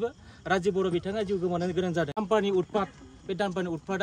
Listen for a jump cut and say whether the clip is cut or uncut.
cut